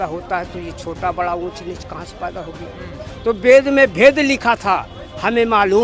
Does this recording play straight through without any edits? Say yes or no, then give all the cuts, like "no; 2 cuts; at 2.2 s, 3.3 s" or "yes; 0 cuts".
yes; 0 cuts